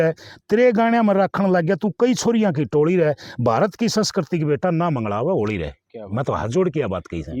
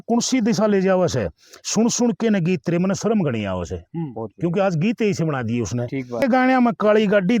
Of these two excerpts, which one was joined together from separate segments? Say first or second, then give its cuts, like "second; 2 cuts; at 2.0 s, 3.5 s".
second; 1 cut; at 6.2 s